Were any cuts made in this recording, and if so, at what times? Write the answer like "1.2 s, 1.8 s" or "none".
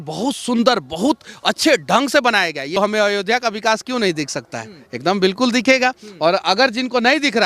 2.8 s

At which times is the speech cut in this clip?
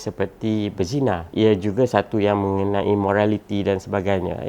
1.3 s

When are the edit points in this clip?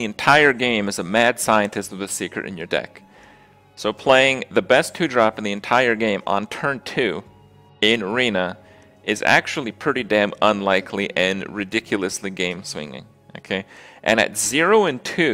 9.9 s

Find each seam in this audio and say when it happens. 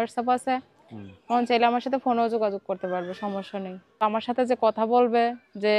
4.0 s

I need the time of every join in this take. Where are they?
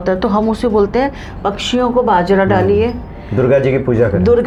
none

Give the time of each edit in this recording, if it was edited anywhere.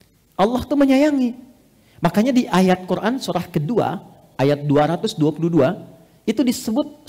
none

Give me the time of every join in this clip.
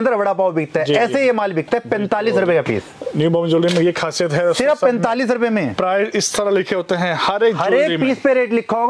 none

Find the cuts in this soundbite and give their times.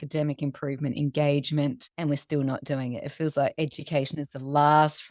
1.9 s

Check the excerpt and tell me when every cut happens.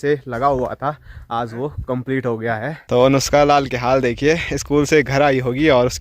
2.8 s

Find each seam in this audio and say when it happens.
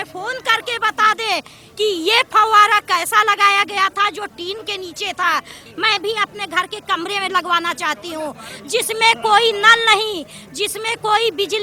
5.6 s

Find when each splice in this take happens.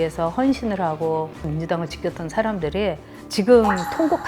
1.4 s

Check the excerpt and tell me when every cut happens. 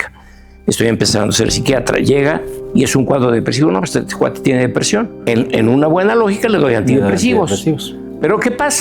5.2 s

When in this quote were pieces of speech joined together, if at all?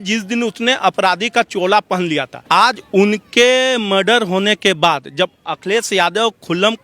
2.3 s

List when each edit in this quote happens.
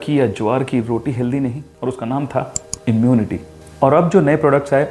1.7 s

